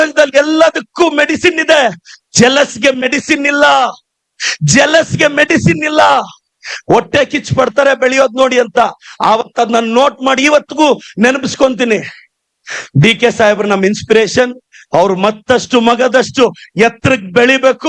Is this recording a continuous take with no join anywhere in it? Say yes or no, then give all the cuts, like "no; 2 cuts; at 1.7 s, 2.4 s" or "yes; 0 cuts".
yes; 0 cuts